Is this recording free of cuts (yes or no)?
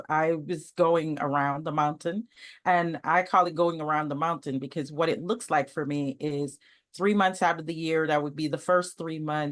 yes